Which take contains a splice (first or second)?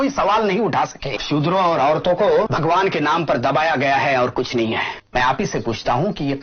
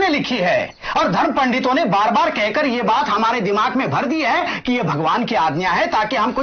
first